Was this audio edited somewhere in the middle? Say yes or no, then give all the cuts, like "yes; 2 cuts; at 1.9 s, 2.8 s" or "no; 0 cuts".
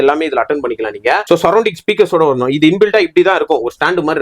yes; 1 cut; at 1.2 s